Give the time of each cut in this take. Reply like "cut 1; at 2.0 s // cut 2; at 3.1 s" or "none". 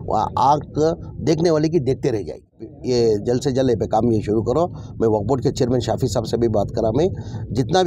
cut 1; at 2.7 s